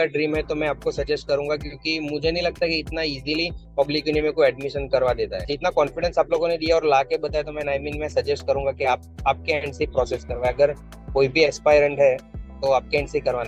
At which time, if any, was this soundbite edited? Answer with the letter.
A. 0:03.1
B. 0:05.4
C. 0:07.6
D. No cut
B